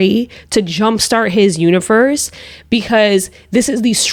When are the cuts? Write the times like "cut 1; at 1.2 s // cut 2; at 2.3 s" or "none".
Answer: none